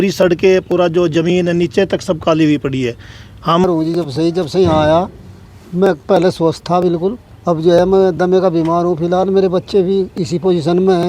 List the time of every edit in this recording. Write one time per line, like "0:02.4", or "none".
0:03.6